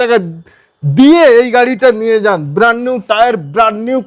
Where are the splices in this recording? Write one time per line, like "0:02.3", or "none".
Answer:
none